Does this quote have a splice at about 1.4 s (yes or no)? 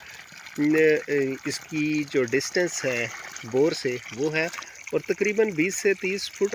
no